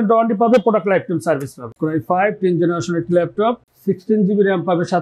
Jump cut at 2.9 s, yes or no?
no